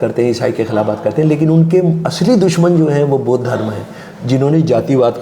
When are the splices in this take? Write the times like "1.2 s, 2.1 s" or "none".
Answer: none